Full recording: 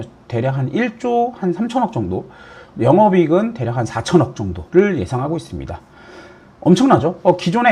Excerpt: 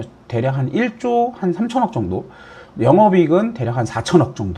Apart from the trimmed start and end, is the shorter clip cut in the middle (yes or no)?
no